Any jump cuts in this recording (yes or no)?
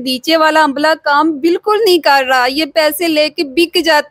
no